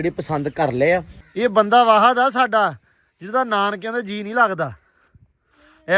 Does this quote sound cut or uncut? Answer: cut